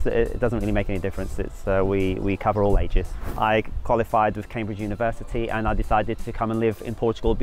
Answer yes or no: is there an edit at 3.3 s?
yes